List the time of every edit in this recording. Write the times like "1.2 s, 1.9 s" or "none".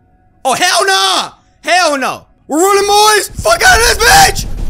2.3 s, 3.3 s